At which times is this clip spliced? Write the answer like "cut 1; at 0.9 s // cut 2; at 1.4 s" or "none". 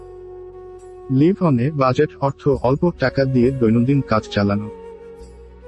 cut 1; at 1.1 s